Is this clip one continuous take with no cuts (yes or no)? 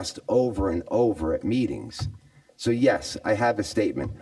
yes